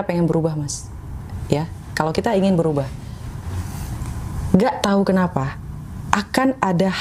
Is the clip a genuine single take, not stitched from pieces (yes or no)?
yes